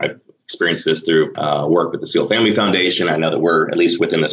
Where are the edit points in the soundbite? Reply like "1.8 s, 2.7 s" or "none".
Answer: 1.3 s